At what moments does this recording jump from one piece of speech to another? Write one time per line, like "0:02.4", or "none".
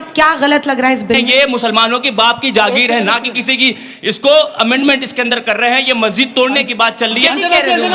0:01.3
0:07.2